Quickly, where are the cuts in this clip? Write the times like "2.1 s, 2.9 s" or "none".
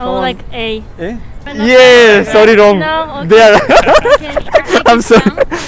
1.4 s